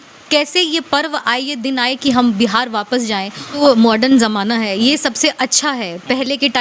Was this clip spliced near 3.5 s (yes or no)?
yes